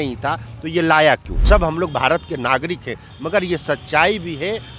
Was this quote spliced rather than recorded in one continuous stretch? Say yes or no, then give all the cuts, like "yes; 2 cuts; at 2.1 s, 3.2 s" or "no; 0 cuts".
yes; 1 cut; at 1.3 s